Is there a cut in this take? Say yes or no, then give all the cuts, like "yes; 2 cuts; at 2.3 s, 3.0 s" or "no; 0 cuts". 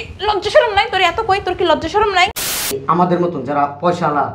yes; 1 cut; at 2.4 s